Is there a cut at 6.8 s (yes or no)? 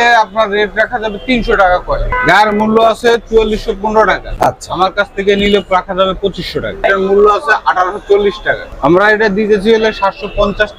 yes